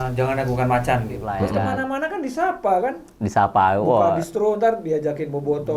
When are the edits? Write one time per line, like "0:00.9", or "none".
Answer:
0:01.2